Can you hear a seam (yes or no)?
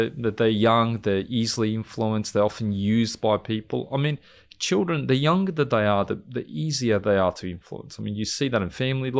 no